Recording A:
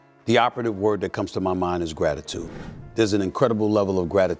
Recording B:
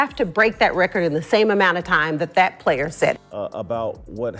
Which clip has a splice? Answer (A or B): B